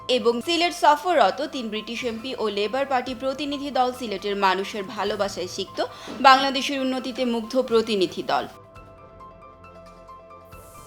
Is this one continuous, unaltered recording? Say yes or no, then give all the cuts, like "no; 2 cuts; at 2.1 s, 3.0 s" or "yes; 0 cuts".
yes; 0 cuts